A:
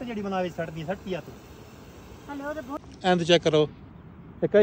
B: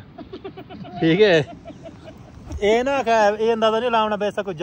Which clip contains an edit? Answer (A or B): A